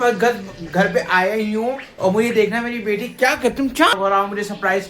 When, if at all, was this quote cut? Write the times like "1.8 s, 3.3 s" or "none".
4.0 s